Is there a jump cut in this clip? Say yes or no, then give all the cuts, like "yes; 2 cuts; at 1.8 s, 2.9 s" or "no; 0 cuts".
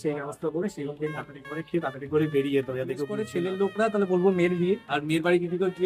yes; 1 cut; at 3.2 s